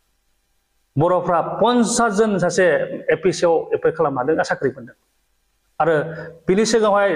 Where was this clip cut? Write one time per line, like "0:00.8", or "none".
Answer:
none